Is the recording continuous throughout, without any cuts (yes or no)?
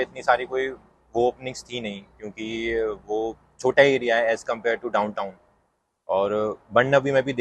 yes